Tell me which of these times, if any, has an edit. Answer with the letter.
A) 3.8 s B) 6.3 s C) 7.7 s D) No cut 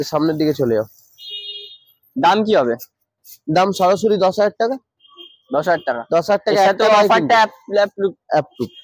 D